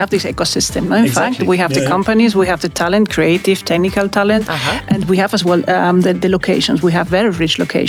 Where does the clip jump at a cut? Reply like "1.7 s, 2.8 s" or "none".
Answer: none